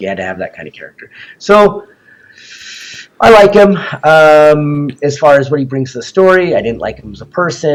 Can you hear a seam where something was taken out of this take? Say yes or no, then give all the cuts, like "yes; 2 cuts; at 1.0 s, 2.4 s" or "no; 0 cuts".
no; 0 cuts